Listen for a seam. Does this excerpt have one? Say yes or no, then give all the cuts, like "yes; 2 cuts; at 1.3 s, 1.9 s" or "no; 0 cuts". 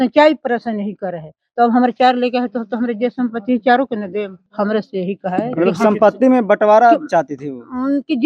yes; 1 cut; at 4.4 s